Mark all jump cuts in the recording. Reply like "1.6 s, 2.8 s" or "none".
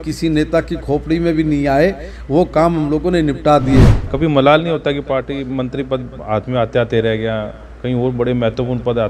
4.0 s

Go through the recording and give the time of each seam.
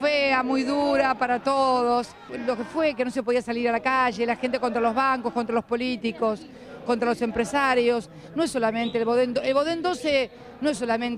2.3 s

